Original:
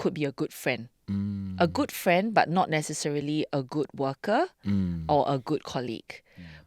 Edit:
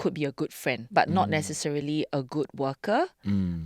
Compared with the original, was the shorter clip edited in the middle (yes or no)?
yes